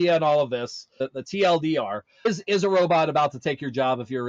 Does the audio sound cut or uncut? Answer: cut